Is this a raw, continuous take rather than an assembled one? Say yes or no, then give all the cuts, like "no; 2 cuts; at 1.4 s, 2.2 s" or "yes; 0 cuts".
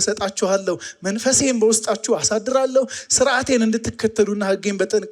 yes; 0 cuts